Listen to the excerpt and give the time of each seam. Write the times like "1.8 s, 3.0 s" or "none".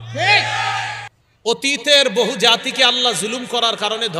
1.0 s